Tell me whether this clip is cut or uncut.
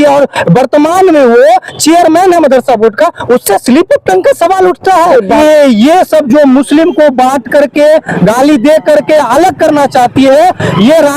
cut